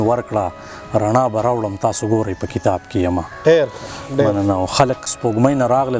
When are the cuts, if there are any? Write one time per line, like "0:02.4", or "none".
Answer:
0:05.1